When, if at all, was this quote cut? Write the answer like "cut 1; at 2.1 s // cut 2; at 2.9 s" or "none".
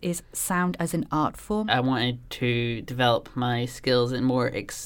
cut 1; at 1.6 s